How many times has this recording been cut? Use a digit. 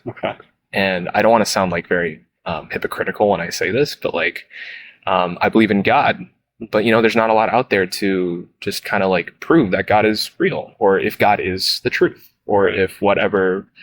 0